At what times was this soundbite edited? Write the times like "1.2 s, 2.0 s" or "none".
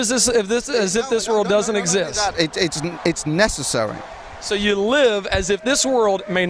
none

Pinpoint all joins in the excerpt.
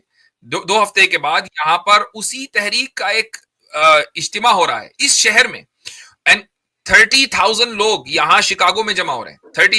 none

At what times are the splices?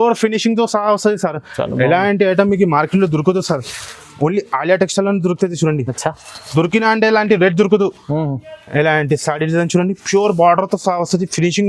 none

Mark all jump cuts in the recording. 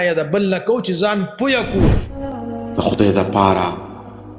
2.3 s

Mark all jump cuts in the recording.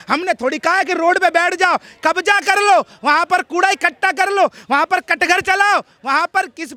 none

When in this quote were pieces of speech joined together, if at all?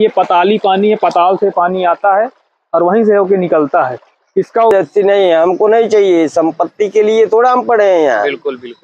4.7 s

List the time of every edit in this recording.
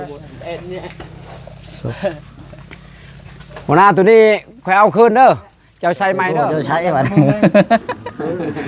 6.6 s

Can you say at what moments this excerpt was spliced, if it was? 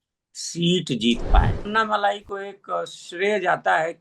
1.7 s

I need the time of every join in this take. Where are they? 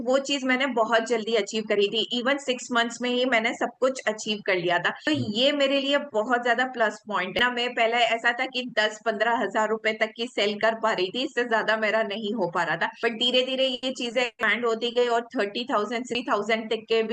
7.4 s

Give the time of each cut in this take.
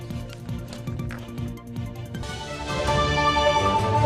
1.0 s

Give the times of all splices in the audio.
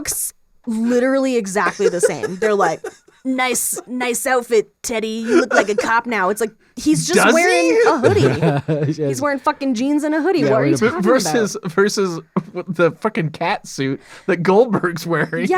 none

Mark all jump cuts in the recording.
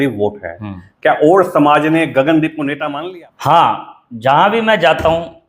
2.9 s

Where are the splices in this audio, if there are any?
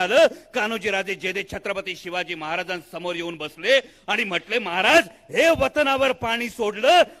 none

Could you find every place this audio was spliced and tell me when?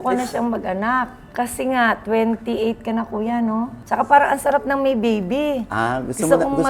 none

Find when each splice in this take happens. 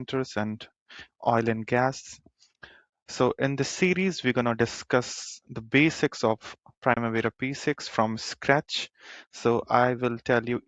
none

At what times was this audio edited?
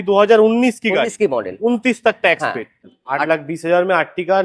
2.7 s

